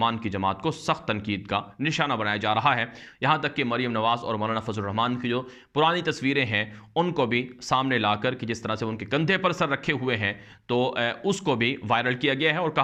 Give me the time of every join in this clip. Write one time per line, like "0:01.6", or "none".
none